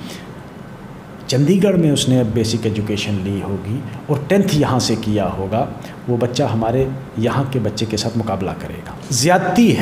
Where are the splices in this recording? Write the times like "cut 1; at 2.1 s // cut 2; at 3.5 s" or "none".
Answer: cut 1; at 8.9 s